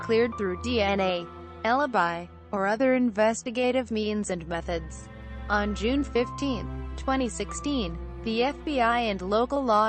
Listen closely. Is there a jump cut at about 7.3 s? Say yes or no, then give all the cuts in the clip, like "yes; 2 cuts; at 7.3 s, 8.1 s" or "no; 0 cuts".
yes; 1 cut; at 7.3 s